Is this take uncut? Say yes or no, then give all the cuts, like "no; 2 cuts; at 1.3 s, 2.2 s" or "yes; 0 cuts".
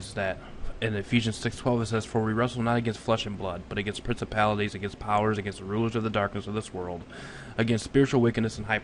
no; 1 cut; at 4.7 s